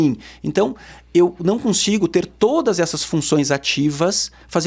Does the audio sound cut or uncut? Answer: uncut